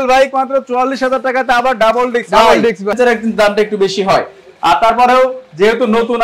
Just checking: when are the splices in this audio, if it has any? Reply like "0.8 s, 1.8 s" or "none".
2.9 s